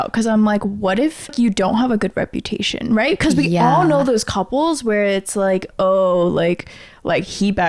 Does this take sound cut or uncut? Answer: cut